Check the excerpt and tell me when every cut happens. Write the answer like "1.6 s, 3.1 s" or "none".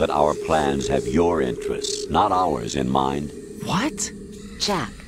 none